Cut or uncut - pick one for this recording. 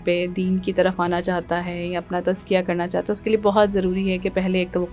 uncut